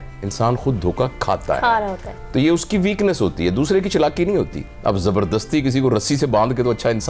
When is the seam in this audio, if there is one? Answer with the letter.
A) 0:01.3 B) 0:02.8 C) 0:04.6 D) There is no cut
C